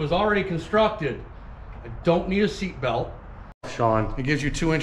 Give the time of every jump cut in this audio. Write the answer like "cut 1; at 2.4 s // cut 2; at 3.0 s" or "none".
cut 1; at 3.6 s